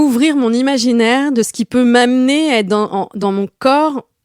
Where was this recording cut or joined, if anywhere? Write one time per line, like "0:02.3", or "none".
0:03.1